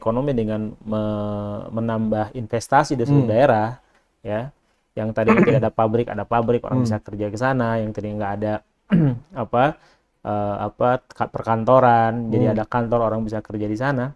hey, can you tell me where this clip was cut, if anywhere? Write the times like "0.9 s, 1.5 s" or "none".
none